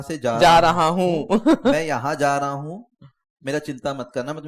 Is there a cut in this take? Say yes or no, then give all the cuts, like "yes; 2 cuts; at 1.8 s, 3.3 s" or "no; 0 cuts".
no; 0 cuts